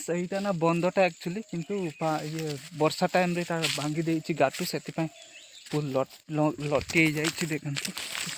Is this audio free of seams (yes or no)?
yes